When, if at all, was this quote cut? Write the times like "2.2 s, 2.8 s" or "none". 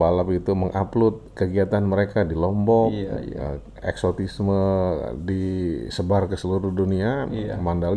none